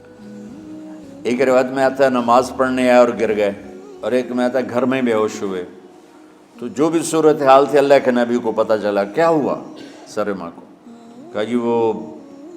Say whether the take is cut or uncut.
cut